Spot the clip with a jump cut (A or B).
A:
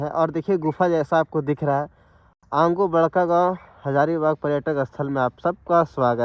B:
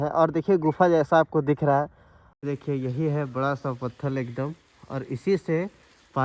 B